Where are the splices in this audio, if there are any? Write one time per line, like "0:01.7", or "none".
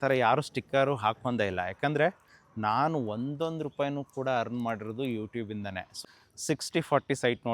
0:05.9